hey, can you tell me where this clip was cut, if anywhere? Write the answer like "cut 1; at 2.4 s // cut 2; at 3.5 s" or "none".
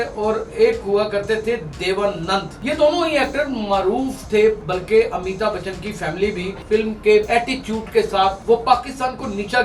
cut 1; at 2.5 s // cut 2; at 6.6 s // cut 3; at 7.3 s // cut 4; at 8.4 s

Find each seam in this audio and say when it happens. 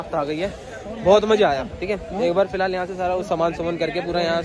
none

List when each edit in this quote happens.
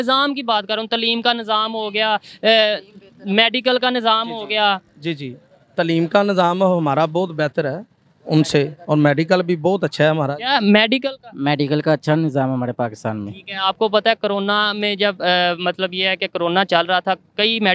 none

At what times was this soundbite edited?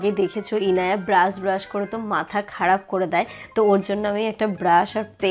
none

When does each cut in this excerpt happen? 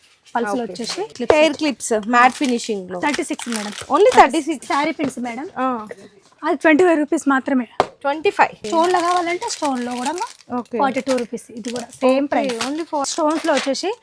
cut 1; at 1.1 s // cut 2; at 4.6 s // cut 3; at 8.6 s // cut 4; at 13.1 s

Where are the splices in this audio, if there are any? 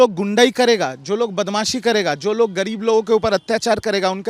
none

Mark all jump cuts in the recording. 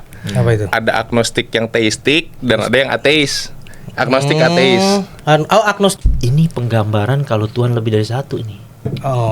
cut 1; at 5.9 s

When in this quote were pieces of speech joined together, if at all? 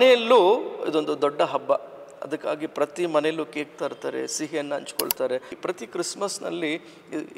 cut 1; at 5.5 s

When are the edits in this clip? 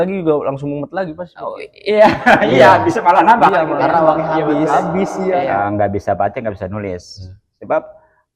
cut 1; at 5.2 s

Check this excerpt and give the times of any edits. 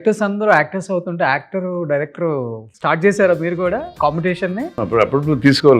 cut 1; at 2.6 s // cut 2; at 3.9 s // cut 3; at 4.8 s

